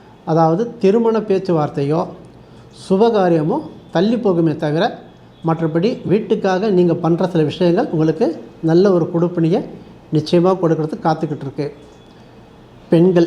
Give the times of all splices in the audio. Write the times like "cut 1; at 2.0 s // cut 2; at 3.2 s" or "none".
none